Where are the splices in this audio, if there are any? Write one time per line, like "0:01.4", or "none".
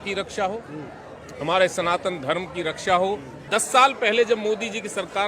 0:03.4